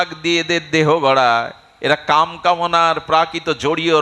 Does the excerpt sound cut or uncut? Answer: uncut